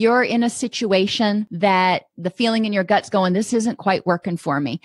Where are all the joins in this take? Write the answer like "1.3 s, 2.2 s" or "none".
1.5 s